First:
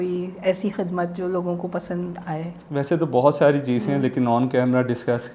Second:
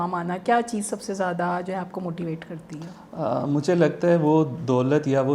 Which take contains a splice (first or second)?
first